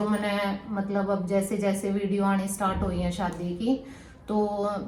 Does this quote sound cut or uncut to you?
uncut